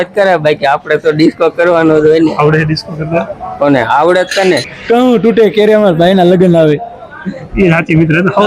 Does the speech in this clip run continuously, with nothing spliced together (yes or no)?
no